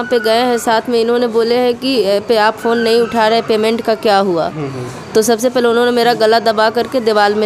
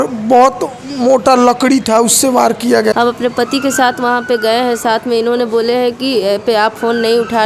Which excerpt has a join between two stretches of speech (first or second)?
second